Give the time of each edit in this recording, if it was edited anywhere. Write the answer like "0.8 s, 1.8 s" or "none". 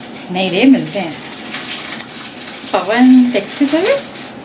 none

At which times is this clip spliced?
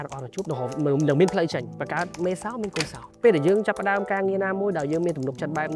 1.7 s, 3.0 s

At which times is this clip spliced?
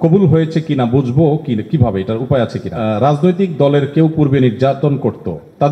2.7 s

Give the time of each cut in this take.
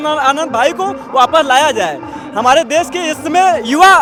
none

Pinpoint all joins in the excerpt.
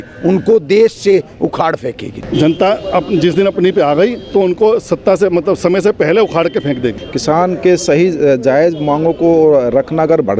2.1 s, 7.1 s

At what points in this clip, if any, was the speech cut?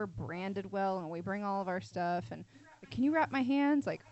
none

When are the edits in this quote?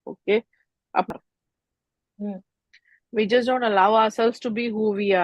1.1 s

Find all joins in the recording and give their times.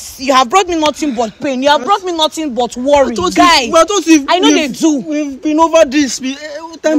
none

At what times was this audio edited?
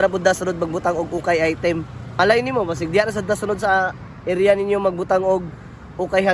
2.2 s

